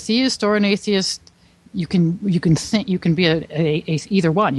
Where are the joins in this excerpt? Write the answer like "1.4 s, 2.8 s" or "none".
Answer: none